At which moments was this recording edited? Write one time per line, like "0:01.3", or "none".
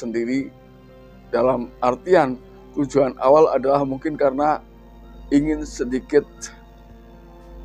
none